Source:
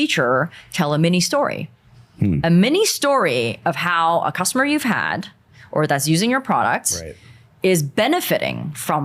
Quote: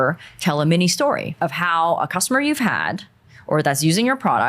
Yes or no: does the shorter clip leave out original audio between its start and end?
yes